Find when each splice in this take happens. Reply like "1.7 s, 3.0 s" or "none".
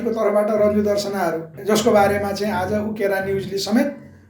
1.5 s